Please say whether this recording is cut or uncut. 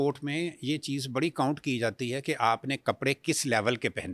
uncut